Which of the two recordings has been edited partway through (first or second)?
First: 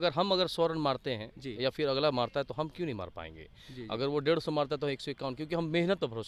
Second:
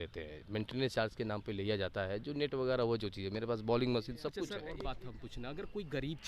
second